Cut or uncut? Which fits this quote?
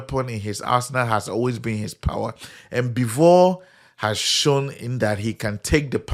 uncut